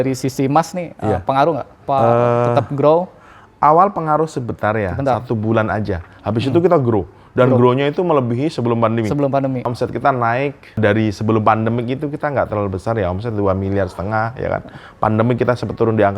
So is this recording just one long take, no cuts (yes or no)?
no